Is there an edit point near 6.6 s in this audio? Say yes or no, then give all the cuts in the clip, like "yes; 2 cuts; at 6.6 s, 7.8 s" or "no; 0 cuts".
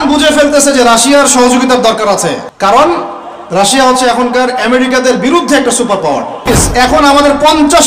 yes; 2 cuts; at 2.5 s, 6.6 s